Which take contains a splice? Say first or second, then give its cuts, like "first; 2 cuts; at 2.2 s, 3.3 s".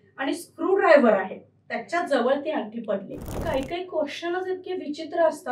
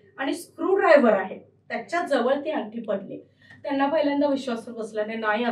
first; 1 cut; at 3.4 s